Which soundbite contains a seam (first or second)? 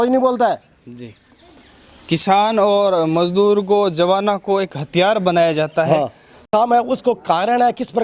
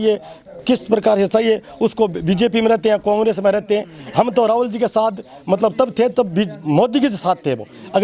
first